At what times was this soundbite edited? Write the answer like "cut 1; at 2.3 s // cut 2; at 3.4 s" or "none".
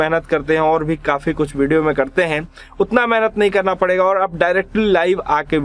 none